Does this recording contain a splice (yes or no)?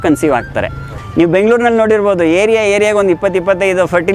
yes